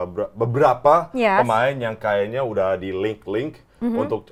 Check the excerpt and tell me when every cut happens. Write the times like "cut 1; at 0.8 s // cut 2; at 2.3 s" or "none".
none

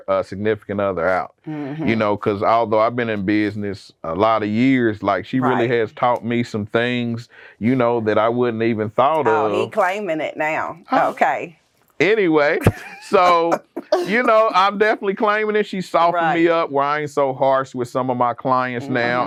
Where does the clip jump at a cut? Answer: none

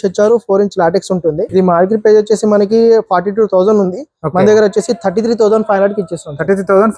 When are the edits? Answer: cut 1; at 1.5 s

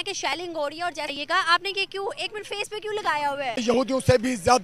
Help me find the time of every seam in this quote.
cut 1; at 1.1 s // cut 2; at 3.6 s

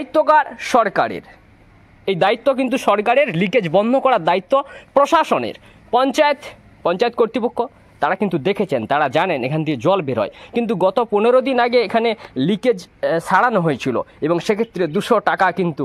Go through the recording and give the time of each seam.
none

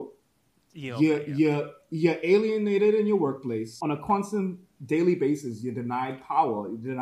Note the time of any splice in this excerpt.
cut 1; at 3.7 s

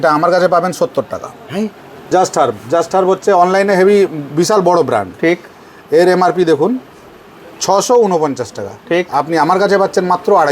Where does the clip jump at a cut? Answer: cut 1; at 2.1 s

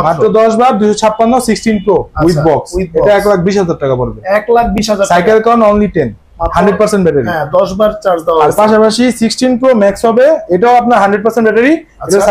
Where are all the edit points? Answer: none

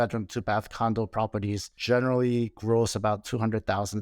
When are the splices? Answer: cut 1; at 1.7 s

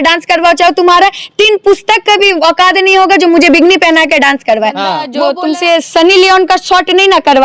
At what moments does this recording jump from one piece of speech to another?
cut 1; at 5.1 s

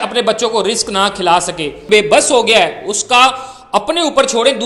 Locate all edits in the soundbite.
cut 1; at 1.8 s

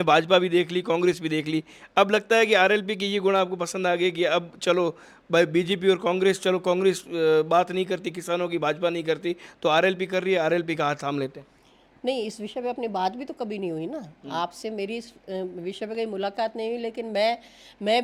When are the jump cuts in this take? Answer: none

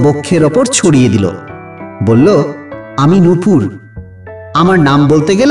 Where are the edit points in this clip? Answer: cut 1; at 1.6 s

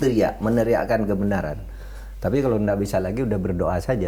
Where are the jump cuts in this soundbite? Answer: none

